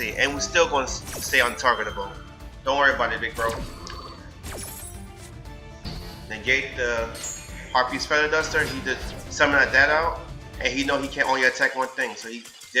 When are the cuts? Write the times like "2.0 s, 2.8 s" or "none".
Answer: none